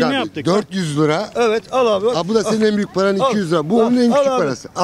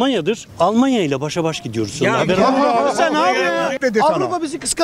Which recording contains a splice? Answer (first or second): second